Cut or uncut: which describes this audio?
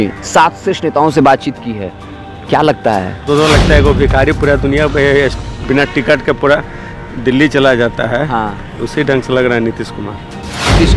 cut